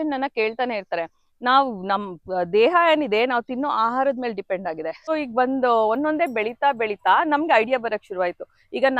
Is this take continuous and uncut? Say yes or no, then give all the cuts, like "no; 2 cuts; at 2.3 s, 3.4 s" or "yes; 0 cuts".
no; 1 cut; at 5.0 s